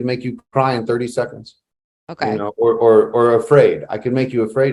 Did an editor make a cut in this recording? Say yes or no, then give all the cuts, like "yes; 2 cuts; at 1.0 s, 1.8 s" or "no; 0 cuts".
no; 0 cuts